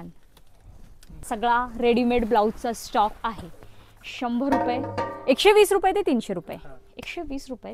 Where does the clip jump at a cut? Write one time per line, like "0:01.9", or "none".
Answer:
0:01.2